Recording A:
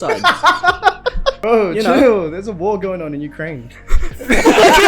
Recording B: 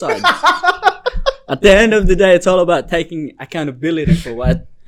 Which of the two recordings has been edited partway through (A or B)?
A